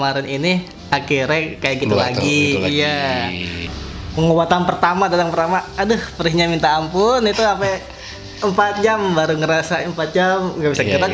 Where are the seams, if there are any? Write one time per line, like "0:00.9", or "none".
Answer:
0:03.7